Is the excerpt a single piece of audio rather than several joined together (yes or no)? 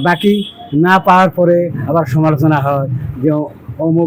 yes